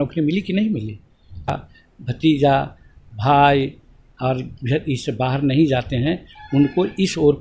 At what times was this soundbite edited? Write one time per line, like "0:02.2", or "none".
0:01.6